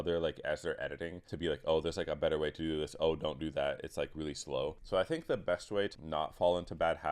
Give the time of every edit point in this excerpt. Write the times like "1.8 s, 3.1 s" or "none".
1.2 s, 4.8 s, 5.9 s